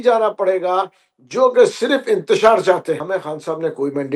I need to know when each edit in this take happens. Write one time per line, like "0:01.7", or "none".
0:03.0